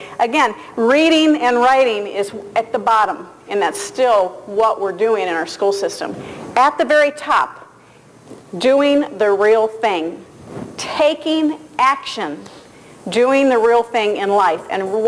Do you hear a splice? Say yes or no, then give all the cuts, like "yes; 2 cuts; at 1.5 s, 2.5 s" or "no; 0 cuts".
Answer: yes; 1 cut; at 3.2 s